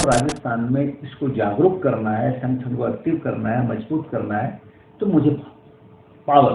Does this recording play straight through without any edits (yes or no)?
yes